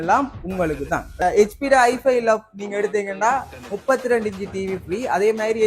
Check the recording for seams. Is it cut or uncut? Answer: cut